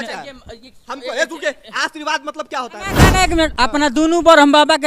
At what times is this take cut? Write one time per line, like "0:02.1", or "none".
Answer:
0:03.1